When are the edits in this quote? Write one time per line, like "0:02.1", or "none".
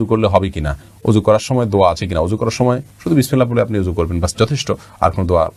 none